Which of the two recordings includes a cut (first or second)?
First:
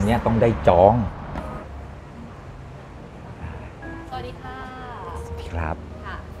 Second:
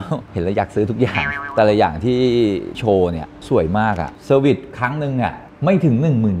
second